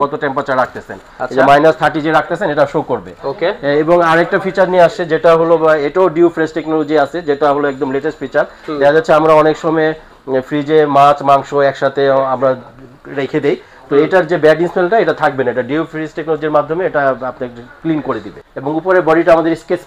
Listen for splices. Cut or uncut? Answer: cut